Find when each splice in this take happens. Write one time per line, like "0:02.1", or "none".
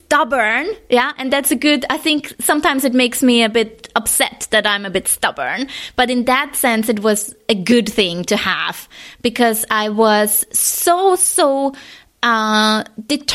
none